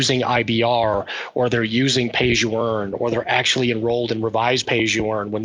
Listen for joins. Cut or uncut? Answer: uncut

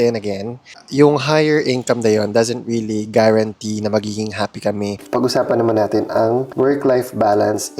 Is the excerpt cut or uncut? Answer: cut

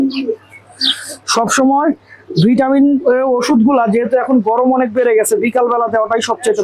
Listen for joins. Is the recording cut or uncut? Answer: uncut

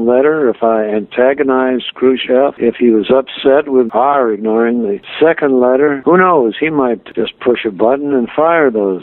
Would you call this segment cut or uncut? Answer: cut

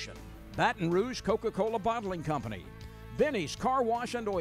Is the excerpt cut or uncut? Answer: uncut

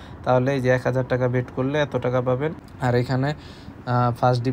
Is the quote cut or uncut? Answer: cut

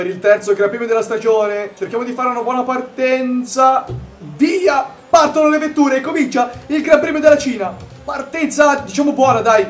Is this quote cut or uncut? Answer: uncut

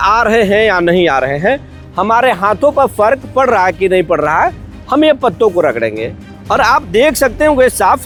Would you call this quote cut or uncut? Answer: uncut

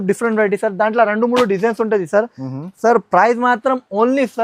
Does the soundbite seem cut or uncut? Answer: uncut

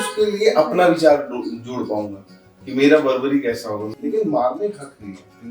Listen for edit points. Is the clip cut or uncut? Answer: cut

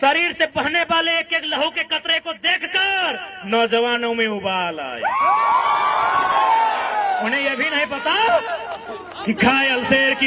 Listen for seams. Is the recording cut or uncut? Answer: cut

